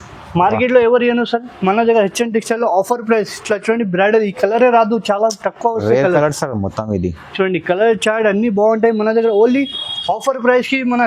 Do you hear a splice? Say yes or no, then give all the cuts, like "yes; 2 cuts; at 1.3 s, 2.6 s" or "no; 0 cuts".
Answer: no; 0 cuts